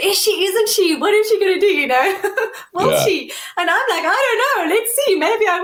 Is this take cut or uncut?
uncut